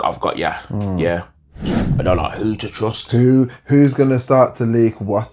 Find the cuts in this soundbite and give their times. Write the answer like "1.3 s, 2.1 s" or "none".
1.8 s